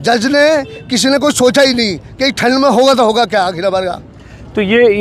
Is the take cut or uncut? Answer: uncut